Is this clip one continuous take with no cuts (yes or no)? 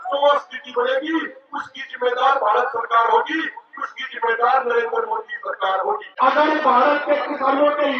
no